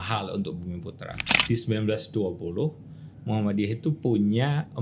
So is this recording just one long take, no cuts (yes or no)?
no